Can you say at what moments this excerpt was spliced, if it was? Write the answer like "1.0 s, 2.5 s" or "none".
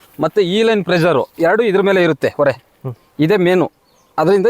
none

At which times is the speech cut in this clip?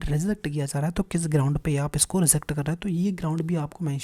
none

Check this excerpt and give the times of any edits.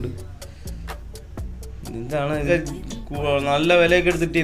2.5 s

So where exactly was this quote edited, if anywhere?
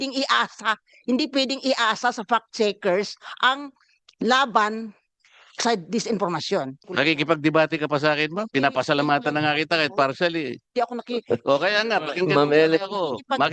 6.8 s

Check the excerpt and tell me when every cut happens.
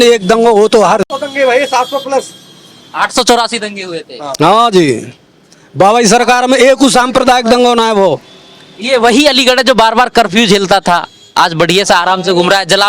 none

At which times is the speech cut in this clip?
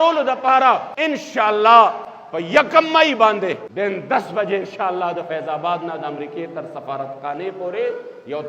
0.9 s, 3.7 s

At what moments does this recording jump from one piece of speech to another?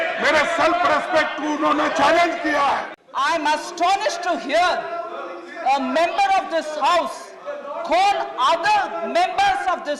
3.0 s

